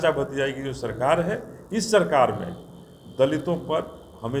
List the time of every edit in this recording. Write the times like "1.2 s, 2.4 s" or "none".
none